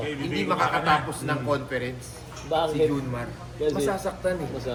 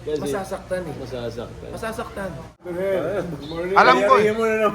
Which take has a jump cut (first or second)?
second